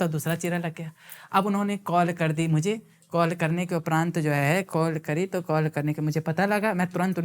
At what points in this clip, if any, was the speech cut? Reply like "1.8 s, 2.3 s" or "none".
none